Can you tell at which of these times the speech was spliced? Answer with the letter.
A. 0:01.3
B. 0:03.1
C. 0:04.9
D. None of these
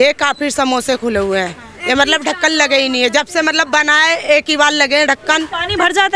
D